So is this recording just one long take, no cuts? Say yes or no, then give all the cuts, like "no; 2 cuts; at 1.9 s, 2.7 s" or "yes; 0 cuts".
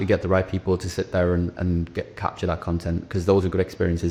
yes; 0 cuts